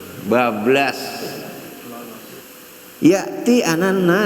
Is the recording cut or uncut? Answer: cut